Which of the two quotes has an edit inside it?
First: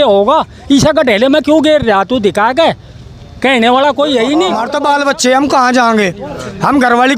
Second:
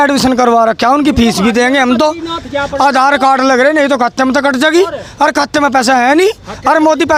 first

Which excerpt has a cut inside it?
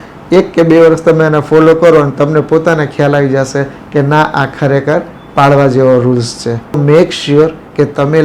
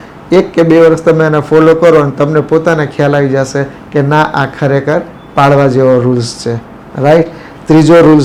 first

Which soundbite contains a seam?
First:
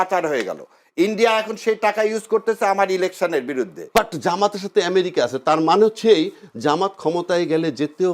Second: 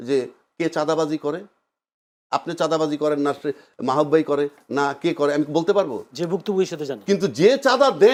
first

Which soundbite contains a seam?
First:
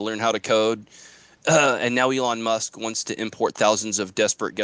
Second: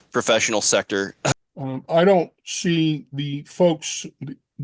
second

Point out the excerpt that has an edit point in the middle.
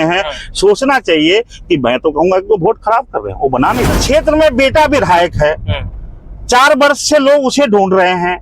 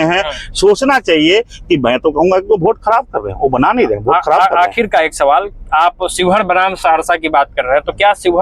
first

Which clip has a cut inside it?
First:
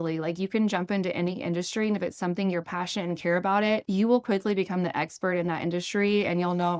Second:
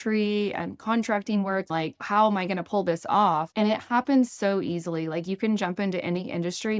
second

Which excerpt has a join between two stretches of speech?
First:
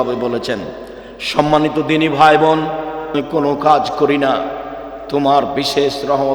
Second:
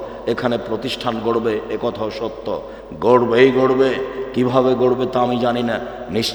first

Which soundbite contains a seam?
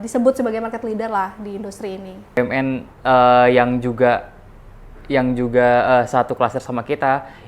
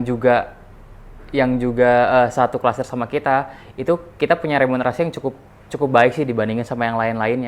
first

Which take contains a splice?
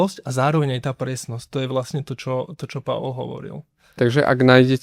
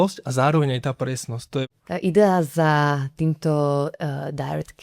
second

